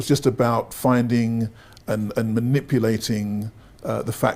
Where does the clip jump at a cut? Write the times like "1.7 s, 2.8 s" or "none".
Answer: none